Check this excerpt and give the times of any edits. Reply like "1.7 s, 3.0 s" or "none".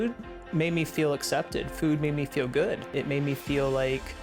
2.9 s